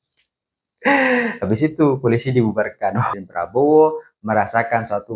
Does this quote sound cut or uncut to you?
cut